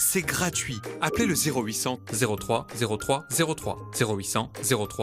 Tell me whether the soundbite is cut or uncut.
uncut